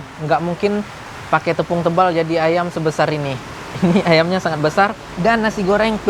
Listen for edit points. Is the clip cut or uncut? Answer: cut